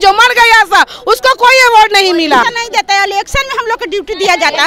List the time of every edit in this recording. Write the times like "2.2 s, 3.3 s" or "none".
2.4 s

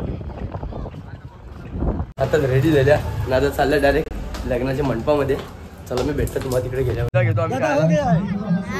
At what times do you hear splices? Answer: 2.1 s, 7.1 s

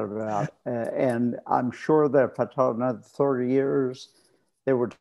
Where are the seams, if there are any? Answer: none

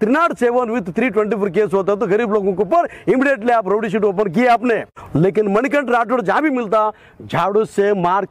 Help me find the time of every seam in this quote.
5.0 s

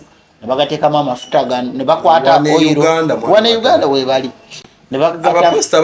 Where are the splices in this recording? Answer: none

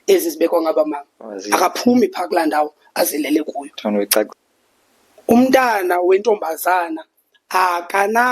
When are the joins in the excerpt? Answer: 4.3 s

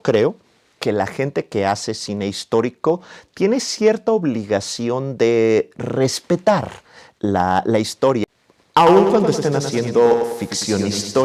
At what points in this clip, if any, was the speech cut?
8.2 s

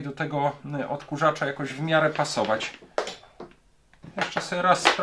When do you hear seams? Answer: 4.0 s

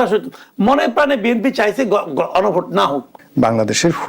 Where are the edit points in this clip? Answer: 3.2 s

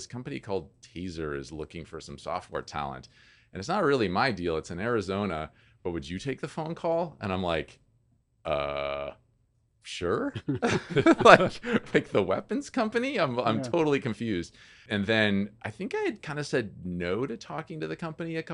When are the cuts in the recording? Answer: 14.8 s

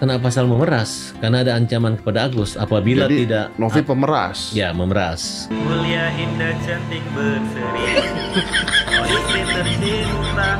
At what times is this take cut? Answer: 5.4 s

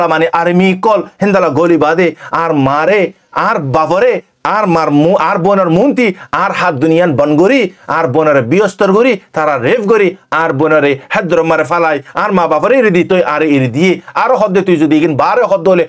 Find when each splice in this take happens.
none

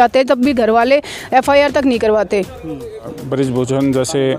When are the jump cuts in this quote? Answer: 3.1 s

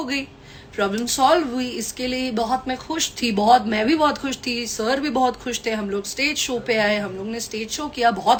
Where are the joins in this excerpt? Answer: none

